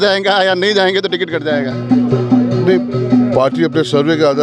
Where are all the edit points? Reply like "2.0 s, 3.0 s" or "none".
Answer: none